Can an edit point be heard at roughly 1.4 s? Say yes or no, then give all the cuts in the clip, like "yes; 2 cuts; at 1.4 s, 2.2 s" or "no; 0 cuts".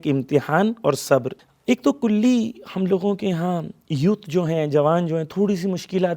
yes; 1 cut; at 1.4 s